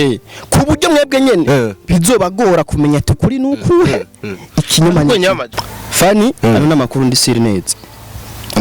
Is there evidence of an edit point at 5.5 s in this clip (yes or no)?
yes